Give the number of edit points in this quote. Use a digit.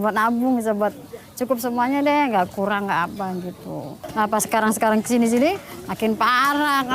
1